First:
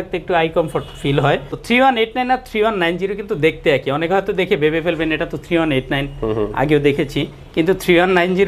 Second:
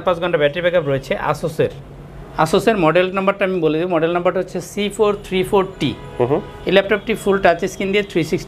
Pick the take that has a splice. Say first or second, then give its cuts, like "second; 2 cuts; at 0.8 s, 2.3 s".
first; 1 cut; at 1.5 s